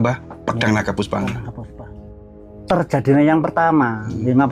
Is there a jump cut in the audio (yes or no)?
yes